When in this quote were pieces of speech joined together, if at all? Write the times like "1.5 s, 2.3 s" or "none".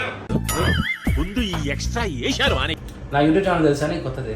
2.9 s